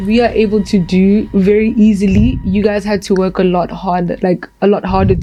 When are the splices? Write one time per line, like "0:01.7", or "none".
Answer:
none